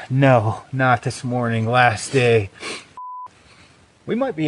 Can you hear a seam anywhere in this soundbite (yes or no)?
yes